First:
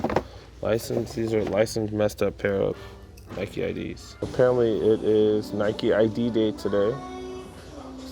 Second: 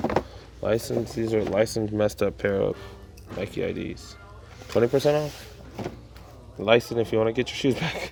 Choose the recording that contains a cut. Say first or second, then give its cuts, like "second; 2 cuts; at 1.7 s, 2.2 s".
first; 1 cut; at 4.1 s